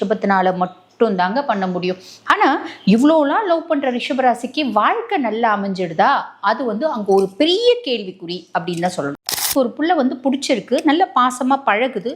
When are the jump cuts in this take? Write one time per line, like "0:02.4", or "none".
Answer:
0:09.1